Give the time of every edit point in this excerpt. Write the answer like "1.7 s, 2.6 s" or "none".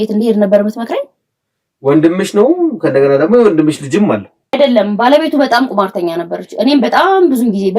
4.6 s